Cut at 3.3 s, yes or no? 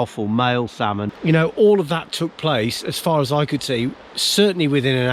no